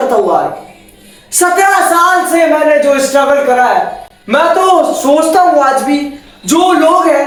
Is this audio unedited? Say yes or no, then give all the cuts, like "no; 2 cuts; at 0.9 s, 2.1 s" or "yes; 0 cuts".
yes; 0 cuts